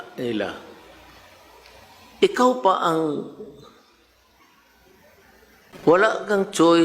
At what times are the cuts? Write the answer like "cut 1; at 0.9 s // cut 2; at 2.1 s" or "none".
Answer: cut 1; at 5.7 s